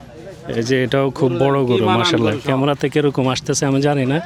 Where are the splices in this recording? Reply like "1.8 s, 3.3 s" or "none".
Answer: none